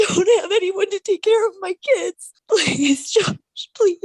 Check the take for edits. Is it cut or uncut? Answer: cut